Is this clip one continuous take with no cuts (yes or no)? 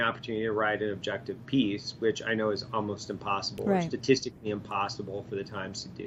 yes